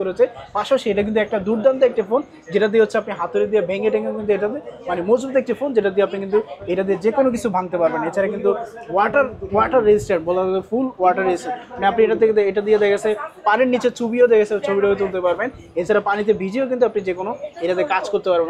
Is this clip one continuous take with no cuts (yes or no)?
yes